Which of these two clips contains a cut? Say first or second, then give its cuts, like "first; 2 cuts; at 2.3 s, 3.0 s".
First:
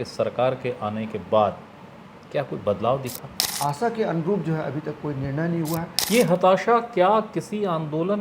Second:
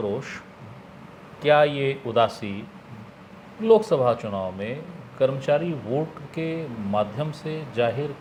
first; 2 cuts; at 3.5 s, 6.0 s